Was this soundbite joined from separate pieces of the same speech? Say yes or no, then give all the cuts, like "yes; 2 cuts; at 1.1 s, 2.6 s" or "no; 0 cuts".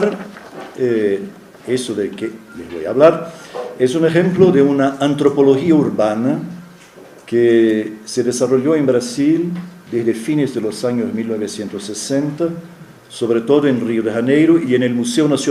no; 0 cuts